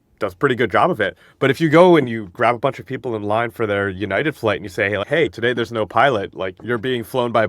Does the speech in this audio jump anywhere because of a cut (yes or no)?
yes